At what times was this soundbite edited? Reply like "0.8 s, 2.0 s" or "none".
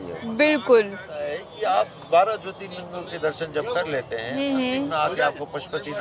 1.4 s

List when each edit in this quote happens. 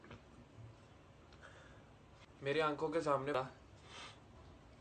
3.3 s

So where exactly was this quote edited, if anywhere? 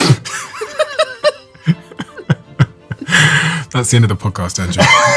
none

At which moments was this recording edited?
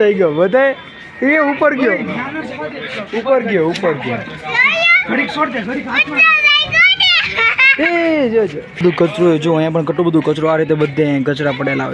8.8 s

